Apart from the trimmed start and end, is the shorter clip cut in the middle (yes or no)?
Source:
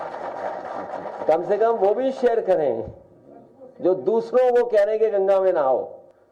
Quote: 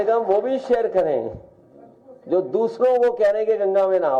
no